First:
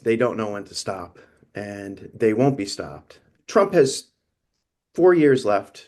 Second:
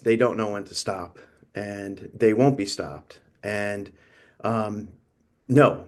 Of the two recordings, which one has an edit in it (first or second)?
first